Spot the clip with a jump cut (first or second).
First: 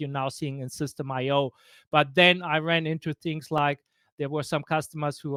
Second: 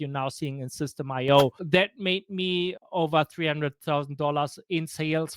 second